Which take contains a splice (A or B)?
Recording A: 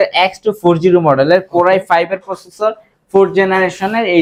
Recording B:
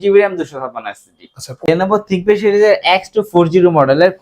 B